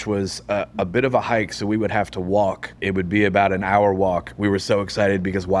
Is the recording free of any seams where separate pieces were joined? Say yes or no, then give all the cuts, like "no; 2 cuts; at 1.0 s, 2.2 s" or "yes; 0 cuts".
no; 2 cuts; at 2.8 s, 4.3 s